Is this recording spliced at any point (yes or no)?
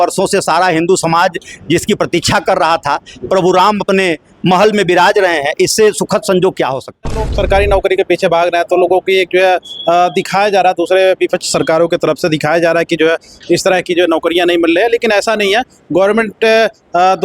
yes